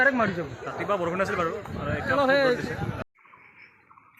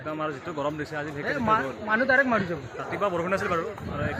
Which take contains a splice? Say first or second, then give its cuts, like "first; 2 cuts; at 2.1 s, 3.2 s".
first; 1 cut; at 3.1 s